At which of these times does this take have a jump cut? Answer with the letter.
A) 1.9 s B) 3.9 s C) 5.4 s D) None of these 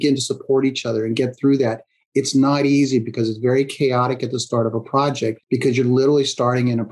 C